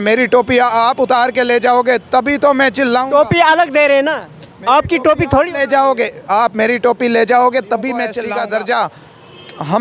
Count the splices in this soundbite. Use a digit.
1